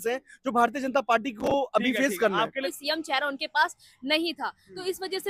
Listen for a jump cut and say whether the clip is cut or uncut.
cut